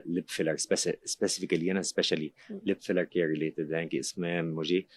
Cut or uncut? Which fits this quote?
uncut